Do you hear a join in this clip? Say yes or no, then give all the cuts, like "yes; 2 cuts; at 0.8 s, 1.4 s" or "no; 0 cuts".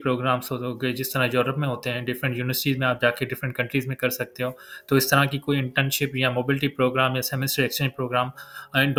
no; 0 cuts